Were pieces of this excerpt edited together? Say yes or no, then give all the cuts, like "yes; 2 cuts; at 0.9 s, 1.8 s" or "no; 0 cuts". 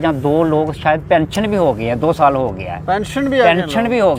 no; 0 cuts